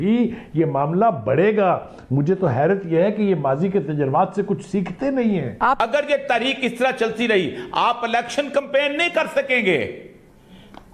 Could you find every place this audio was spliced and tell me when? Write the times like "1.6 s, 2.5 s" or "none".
5.8 s

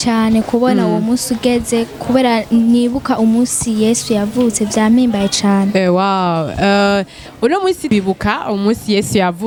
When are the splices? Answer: none

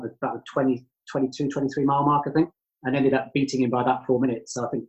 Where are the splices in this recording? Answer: none

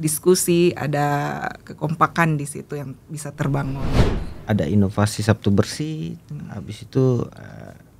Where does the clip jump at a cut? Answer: 4.0 s

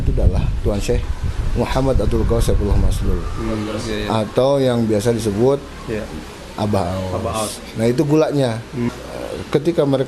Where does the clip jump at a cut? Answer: 8.9 s

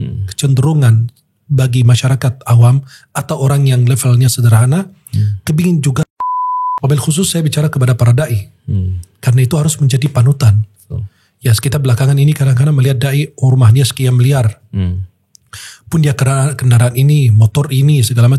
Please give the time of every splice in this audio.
6.1 s

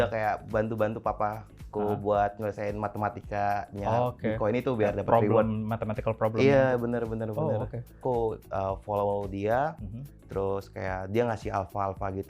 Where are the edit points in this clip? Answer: 8.0 s

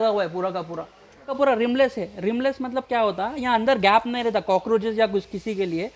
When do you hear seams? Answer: 1.3 s

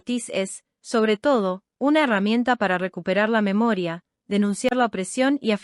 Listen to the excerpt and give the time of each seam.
1.9 s

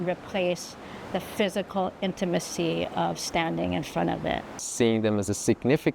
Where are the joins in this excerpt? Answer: 4.6 s

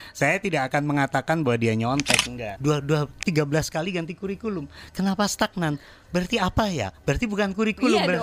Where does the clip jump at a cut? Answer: 2.5 s

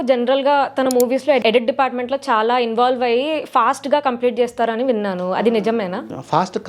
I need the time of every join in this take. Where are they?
1.4 s

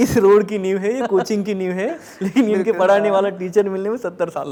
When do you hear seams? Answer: none

